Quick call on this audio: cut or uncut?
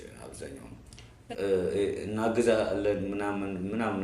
cut